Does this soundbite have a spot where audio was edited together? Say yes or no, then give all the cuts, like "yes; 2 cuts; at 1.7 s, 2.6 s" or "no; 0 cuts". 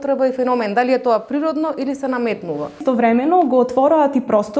yes; 1 cut; at 2.8 s